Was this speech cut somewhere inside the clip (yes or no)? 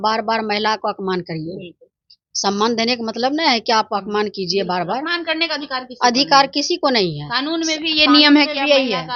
no